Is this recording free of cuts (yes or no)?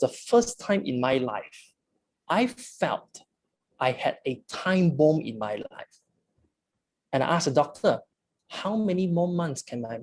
yes